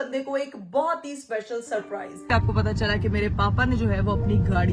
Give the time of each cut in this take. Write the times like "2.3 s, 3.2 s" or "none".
2.3 s

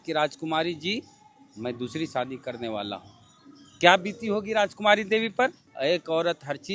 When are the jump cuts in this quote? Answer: 5.7 s

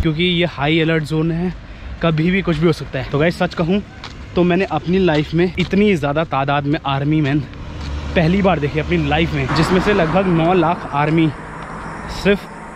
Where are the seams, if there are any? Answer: 3.0 s, 5.5 s, 9.4 s

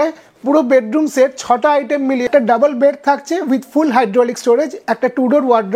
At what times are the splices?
2.2 s

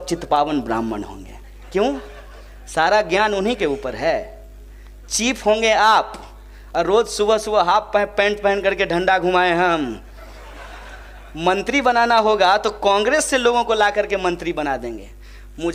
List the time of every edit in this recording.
none

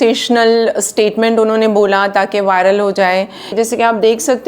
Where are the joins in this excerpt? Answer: 3.5 s

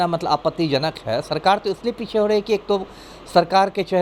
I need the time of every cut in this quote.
none

